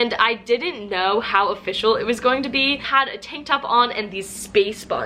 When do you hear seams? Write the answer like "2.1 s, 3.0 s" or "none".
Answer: 2.9 s